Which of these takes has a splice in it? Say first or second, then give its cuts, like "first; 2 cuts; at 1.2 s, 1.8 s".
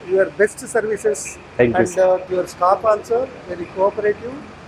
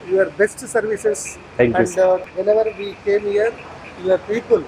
first; 1 cut; at 2.3 s